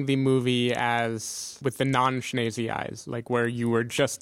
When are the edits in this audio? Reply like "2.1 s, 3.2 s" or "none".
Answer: 1.6 s